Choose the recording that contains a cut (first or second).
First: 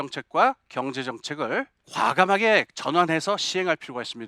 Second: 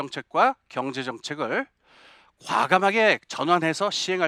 first